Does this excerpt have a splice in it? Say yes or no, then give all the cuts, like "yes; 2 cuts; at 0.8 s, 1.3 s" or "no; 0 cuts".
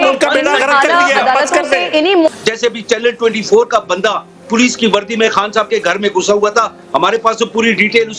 yes; 1 cut; at 2.3 s